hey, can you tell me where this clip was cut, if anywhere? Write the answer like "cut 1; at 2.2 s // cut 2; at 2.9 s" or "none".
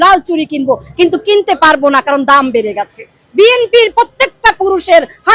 none